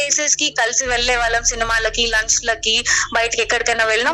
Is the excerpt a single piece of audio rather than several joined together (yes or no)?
yes